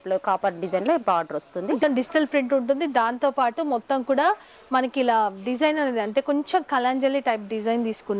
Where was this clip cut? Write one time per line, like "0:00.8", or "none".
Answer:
0:01.8